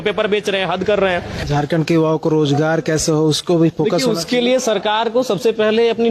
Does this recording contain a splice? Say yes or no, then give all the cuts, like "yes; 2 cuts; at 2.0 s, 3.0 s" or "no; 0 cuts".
yes; 1 cut; at 1.5 s